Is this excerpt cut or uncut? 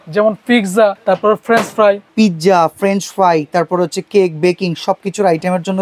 cut